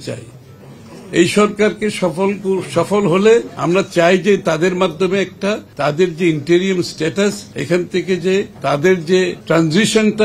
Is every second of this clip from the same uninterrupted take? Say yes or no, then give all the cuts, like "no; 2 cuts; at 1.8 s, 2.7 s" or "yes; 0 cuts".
no; 5 cuts; at 3.5 s, 5.7 s, 7.5 s, 8.5 s, 9.4 s